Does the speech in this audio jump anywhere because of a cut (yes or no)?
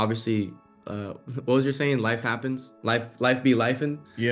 yes